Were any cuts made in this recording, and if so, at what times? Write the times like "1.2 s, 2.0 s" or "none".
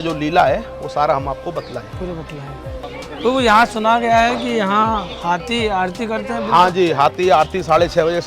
2.8 s